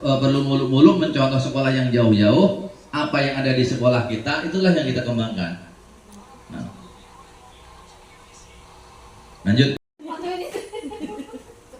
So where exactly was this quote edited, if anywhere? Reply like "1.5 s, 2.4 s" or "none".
9.9 s